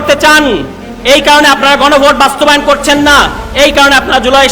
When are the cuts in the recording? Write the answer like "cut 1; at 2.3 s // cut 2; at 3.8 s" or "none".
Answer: none